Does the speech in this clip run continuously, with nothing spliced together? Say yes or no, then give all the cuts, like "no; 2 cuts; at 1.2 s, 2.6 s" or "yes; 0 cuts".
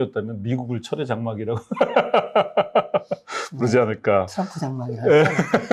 yes; 0 cuts